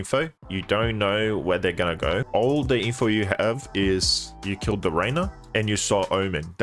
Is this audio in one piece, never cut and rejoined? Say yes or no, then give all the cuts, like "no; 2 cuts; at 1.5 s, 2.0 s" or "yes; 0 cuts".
yes; 0 cuts